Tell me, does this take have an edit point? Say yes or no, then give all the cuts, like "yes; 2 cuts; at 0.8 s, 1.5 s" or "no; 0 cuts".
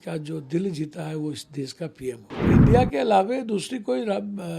yes; 1 cut; at 2.5 s